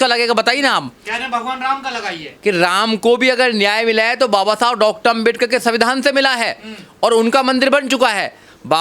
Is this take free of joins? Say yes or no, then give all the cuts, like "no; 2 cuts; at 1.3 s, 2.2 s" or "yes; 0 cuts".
yes; 0 cuts